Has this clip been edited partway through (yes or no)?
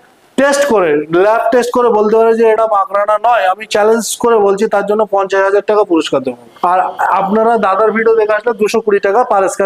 no